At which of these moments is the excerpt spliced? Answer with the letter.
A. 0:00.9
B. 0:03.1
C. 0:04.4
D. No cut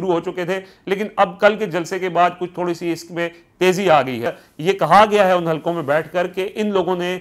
C